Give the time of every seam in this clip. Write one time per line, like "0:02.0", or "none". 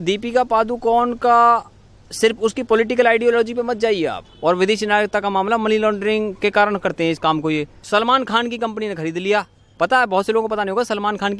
0:07.8